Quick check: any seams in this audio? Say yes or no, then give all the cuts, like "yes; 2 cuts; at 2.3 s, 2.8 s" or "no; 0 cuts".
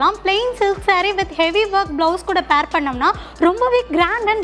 no; 0 cuts